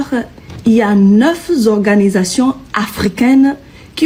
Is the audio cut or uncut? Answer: uncut